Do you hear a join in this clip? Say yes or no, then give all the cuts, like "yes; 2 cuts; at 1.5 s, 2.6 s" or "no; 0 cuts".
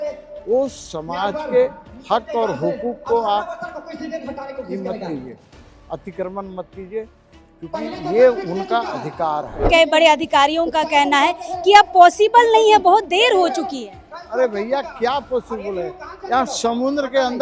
yes; 1 cut; at 9.6 s